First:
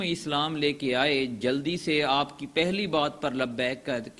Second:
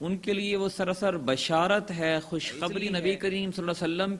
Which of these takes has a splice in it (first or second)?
second